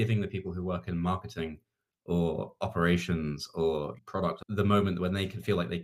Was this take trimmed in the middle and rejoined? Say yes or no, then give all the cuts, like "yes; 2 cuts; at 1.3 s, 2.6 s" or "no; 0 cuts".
yes; 1 cut; at 3.9 s